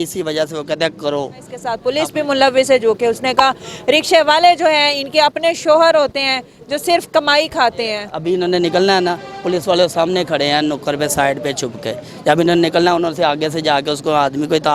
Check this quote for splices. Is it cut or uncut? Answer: cut